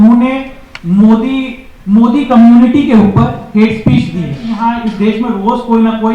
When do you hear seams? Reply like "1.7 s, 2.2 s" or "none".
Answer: 4.4 s